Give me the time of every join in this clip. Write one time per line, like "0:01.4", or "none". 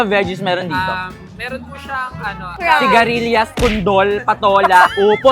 0:02.5